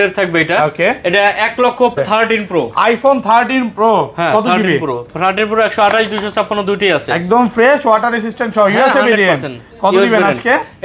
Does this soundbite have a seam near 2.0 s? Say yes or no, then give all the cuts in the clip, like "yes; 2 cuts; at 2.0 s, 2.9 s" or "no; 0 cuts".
yes; 1 cut; at 2.0 s